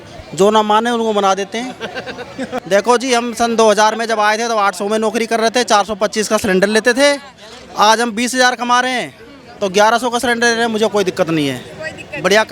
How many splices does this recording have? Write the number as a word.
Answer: one